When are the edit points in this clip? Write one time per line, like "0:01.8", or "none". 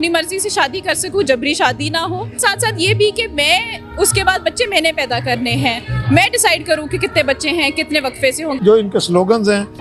0:02.4
0:08.6